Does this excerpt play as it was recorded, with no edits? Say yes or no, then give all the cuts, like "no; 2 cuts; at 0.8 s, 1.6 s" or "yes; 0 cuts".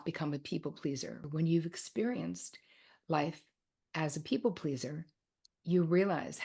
no; 1 cut; at 1.2 s